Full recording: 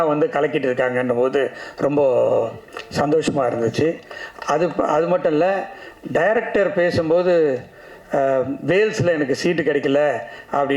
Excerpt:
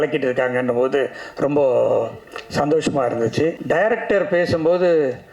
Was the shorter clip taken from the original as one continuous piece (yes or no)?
no